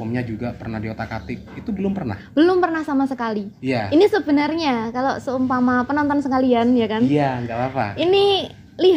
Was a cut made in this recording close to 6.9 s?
no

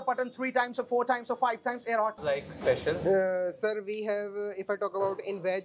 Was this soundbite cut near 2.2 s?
yes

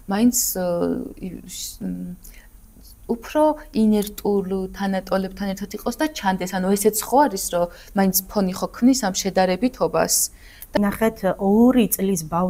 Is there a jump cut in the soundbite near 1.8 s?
no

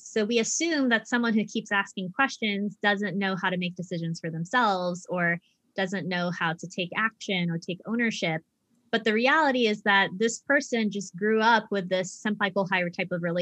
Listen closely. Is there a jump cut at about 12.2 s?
yes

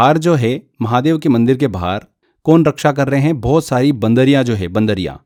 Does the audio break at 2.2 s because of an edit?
no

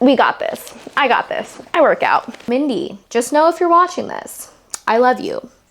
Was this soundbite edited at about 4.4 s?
no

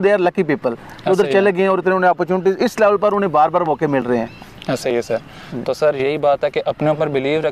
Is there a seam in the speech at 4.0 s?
no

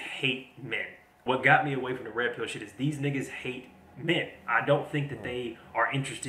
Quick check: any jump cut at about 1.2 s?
yes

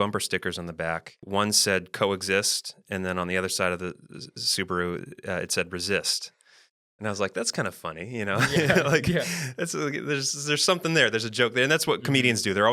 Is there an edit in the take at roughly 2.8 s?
no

